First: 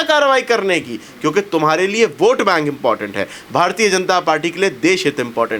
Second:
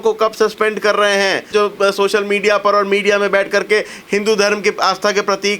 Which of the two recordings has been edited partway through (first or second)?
second